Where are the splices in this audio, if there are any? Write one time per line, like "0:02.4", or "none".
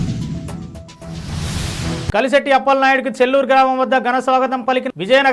none